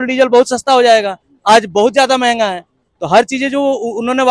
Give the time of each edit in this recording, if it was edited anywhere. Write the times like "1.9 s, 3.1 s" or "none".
none